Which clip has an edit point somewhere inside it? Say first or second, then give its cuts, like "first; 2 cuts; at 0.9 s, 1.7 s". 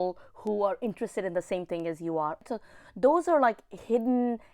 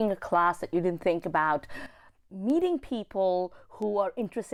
first; 1 cut; at 2.4 s